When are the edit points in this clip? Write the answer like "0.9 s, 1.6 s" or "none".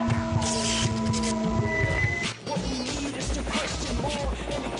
1.7 s